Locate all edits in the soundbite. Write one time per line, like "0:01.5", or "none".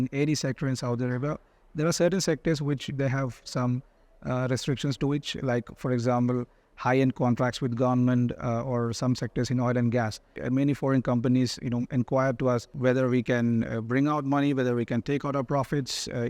0:10.4
0:12.7